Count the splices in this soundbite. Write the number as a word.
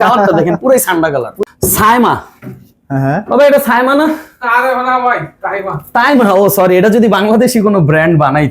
one